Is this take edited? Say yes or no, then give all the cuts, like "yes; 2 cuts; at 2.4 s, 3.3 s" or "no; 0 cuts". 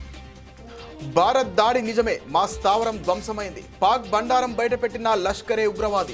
yes; 1 cut; at 1.2 s